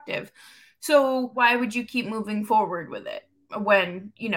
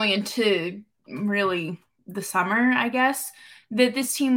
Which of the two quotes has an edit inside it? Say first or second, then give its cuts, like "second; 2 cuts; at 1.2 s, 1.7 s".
first; 1 cut; at 1.3 s